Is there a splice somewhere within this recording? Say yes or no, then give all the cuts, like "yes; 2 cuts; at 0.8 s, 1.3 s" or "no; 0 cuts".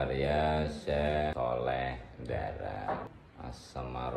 yes; 1 cut; at 3.2 s